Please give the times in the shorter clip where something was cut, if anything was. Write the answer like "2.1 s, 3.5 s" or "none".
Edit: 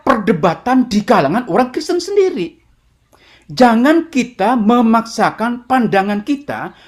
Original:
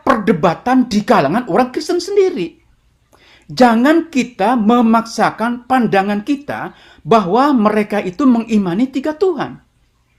none